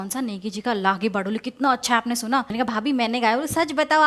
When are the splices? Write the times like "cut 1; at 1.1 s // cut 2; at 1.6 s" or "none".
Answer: cut 1; at 2.5 s

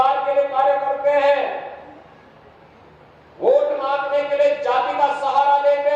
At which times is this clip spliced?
none

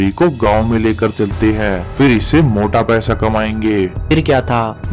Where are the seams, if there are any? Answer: cut 1; at 4.0 s

